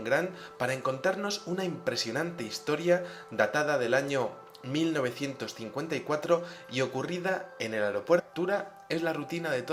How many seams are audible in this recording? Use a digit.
0